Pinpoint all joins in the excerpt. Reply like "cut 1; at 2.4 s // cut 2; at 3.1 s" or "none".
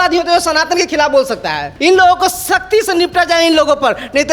cut 1; at 1.7 s